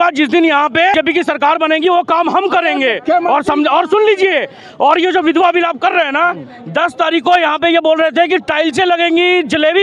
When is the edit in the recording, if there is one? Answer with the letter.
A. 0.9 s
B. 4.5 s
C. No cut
A